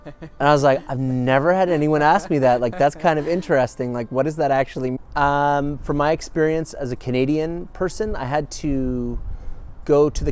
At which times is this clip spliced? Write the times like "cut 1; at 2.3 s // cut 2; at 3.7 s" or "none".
cut 1; at 5.0 s